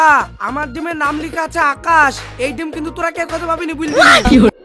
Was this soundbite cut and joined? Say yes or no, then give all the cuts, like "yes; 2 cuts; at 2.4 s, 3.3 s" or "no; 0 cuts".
no; 0 cuts